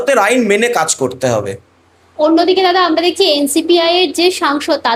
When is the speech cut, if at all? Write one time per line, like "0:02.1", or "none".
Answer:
none

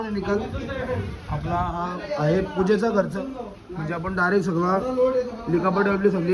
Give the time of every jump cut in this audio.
none

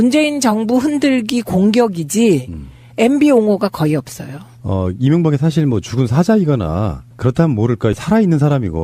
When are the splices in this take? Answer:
0:02.0

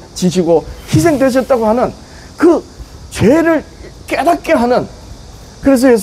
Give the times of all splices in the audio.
none

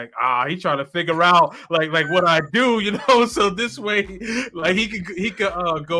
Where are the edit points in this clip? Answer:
none

